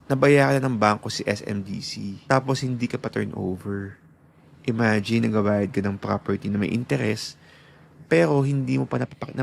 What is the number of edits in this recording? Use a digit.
1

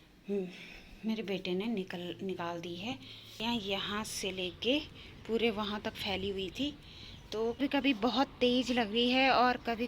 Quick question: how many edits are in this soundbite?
2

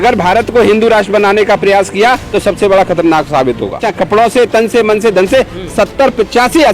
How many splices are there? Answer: 1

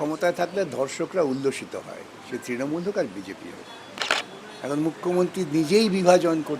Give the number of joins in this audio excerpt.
1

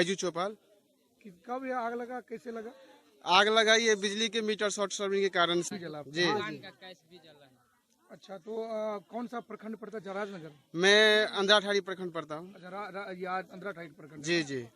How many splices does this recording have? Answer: 1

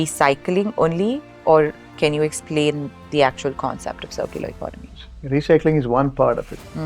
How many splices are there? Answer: 1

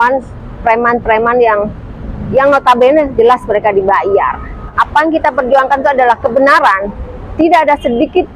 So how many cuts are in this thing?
1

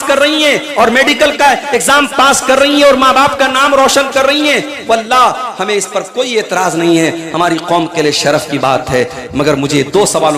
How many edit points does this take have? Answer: 0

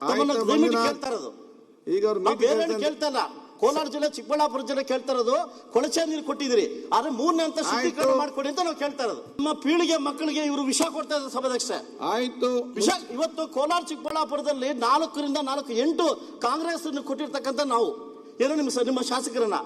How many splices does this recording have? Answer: 1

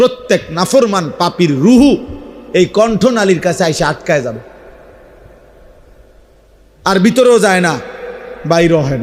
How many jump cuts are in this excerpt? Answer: 0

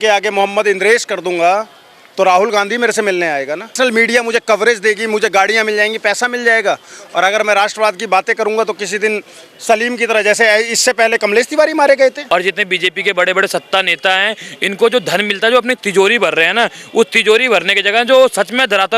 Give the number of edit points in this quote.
2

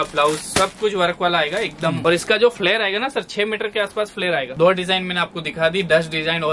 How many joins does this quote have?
2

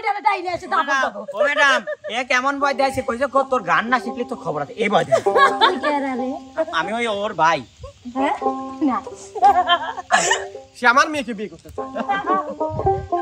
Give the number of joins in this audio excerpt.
0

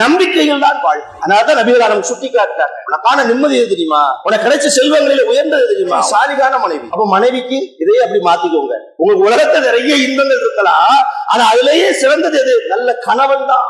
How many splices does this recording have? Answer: 7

